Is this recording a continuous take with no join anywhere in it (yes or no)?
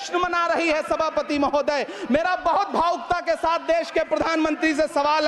yes